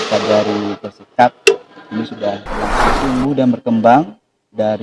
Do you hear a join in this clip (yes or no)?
yes